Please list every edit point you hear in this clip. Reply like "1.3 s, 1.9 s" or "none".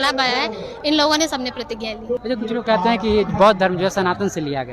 2.2 s